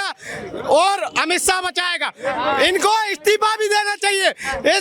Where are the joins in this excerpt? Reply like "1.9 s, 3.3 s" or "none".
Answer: none